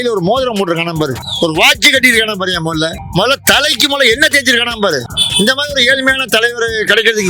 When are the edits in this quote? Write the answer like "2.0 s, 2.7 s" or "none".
1.2 s, 3.0 s, 5.2 s